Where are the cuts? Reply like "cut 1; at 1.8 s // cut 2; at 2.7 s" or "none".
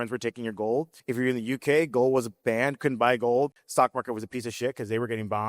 cut 1; at 0.9 s // cut 2; at 3.6 s